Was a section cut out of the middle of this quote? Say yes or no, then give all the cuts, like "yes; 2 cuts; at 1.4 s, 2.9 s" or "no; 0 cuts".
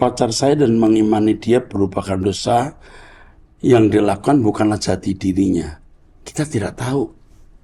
no; 0 cuts